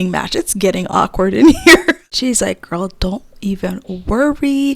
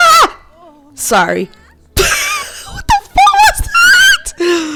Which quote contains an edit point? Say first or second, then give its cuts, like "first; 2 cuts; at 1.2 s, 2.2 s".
first; 1 cut; at 2.0 s